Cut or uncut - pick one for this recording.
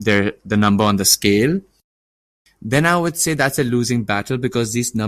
uncut